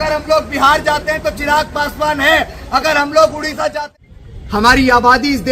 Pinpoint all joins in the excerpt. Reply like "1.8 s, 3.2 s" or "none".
3.8 s